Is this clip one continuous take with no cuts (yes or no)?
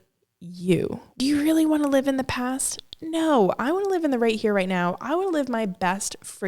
no